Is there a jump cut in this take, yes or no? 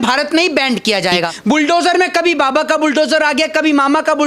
yes